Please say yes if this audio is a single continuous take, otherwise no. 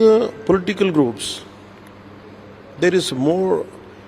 yes